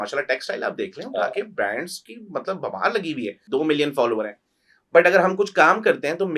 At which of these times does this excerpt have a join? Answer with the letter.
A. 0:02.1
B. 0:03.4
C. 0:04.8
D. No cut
B